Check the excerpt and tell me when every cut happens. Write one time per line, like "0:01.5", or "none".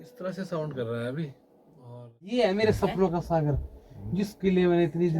0:02.3